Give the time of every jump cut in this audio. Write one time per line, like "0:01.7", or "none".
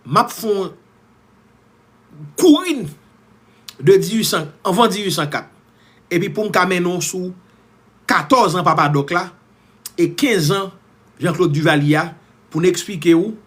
none